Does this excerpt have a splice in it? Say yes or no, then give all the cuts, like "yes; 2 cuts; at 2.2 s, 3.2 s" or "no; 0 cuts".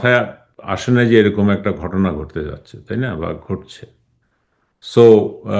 no; 0 cuts